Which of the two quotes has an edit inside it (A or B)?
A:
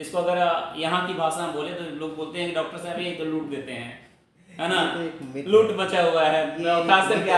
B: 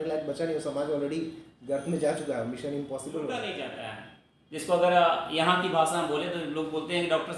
B